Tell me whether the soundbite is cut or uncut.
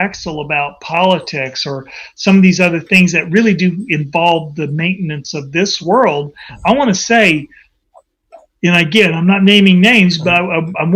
uncut